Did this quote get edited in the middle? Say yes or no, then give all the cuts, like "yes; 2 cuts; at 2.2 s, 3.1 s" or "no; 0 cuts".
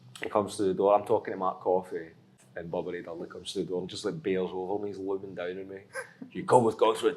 yes; 1 cut; at 2.5 s